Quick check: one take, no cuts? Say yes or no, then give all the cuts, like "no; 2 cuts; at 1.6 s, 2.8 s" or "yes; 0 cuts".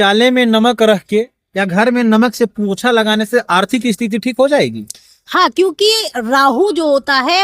yes; 0 cuts